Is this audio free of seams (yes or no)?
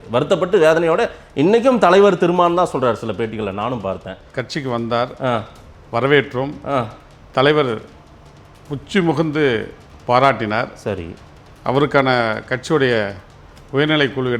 no